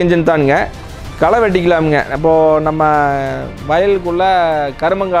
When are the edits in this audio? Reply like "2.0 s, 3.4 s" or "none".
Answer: none